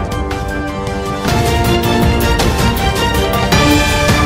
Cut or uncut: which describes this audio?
uncut